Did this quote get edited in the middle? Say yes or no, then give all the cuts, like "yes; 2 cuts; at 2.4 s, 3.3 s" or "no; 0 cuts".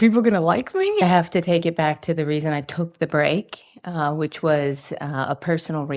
yes; 1 cut; at 1.0 s